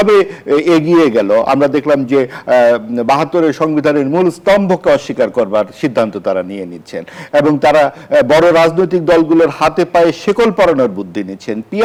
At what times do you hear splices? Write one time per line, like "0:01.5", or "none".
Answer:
none